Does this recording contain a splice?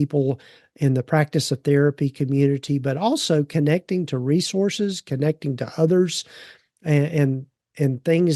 no; 0 cuts

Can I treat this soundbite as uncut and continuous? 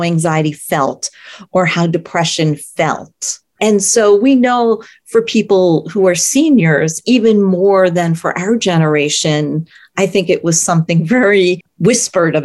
yes; 0 cuts

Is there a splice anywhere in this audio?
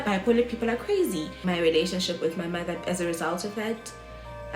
yes; 1 cut; at 1.5 s

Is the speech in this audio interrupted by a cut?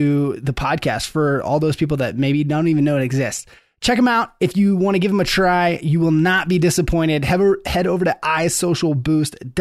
no; 0 cuts

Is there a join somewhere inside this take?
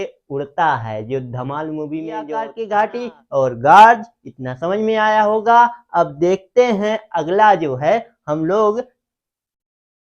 yes; 1 cut; at 2.5 s

